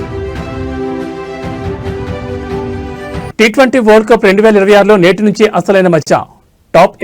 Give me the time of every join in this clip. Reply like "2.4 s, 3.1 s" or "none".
none